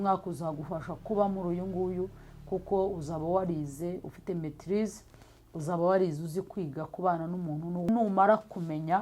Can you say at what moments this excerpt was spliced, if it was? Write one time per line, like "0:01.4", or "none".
0:07.9